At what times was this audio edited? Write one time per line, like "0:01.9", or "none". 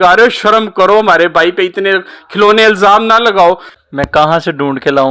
0:03.7